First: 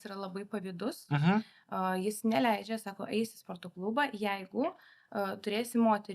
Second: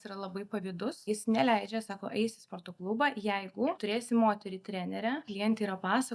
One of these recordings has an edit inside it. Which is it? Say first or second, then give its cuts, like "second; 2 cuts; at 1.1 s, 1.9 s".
second; 3 cuts; at 1.1 s, 3.8 s, 5.3 s